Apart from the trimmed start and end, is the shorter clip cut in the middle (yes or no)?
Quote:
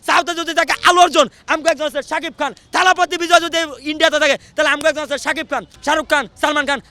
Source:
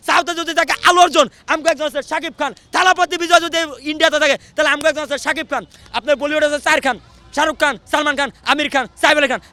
yes